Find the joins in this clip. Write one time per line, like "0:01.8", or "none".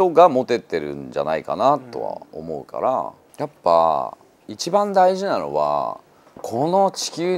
0:03.2